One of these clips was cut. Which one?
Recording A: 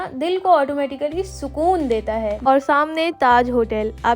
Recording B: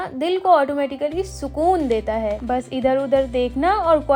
A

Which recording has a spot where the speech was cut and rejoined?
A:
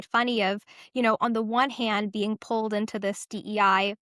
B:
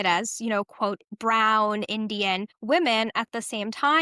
B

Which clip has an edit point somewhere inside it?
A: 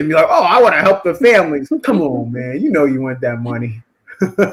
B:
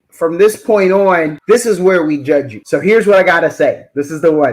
B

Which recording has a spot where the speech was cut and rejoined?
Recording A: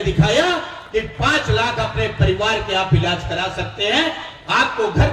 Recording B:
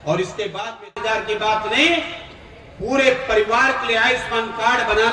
B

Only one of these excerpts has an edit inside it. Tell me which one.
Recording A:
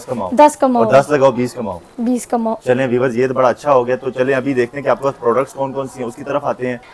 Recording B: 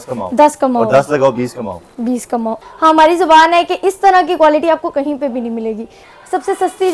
B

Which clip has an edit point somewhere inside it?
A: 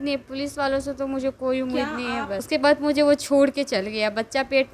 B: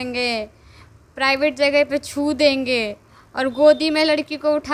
A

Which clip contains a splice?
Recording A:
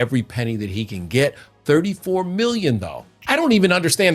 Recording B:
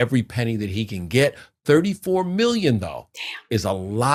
A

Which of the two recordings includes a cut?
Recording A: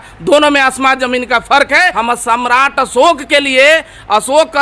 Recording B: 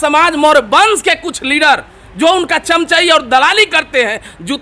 A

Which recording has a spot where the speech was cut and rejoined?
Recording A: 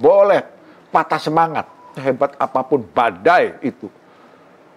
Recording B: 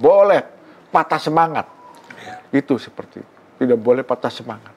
A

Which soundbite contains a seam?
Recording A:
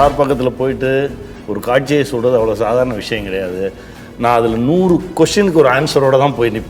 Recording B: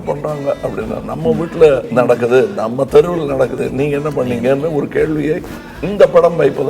B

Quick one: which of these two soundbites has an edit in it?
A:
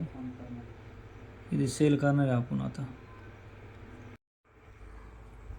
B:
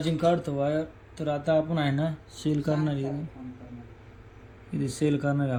A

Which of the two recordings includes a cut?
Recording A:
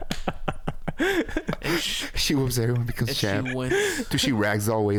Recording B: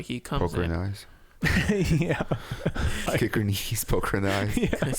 B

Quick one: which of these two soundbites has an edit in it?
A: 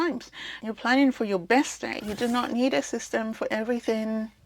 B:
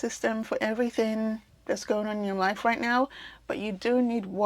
A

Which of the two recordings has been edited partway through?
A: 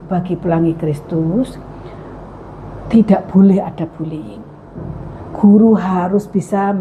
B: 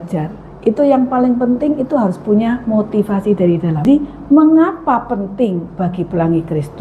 B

